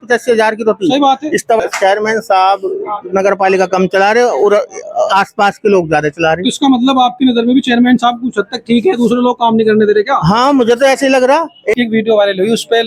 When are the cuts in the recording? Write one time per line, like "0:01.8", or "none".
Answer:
0:01.6
0:11.7